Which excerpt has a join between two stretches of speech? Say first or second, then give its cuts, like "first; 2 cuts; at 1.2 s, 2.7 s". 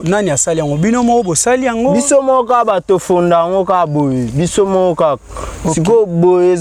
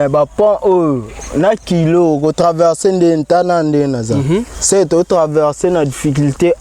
second; 1 cut; at 4.5 s